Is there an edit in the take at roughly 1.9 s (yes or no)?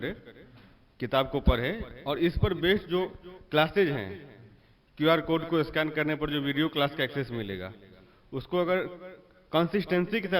no